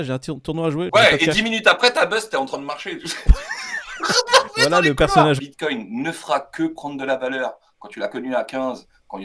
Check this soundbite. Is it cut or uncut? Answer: cut